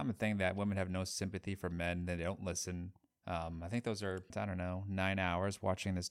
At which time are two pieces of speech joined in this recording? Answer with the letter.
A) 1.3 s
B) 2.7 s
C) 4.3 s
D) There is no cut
C